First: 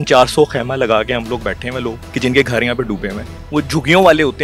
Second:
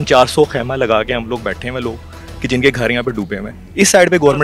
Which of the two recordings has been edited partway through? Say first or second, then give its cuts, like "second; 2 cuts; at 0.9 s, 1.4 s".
first; 2 cuts; at 2.0 s, 3.3 s